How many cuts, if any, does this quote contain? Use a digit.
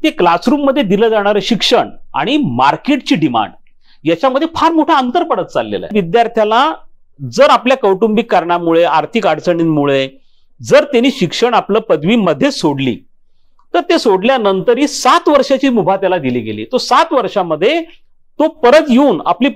1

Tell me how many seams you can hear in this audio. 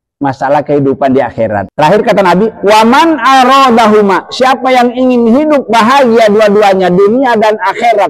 1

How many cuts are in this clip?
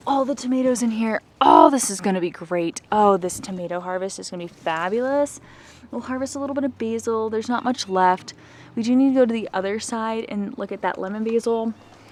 0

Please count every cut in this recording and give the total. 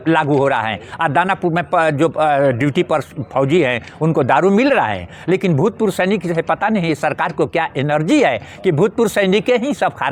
0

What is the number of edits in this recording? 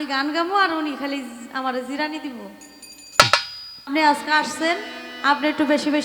1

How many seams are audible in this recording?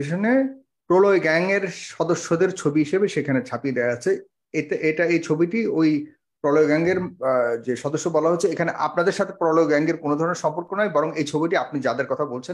0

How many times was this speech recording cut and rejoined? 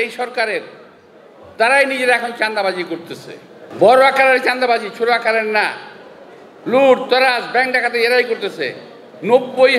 1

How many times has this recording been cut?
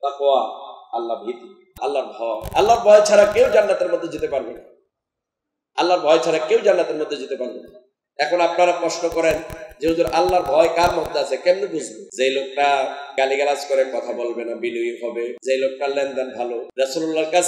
5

